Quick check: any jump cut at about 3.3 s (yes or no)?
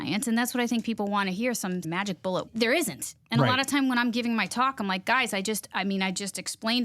no